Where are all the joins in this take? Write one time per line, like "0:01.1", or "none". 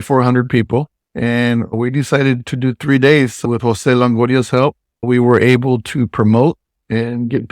0:01.0
0:04.9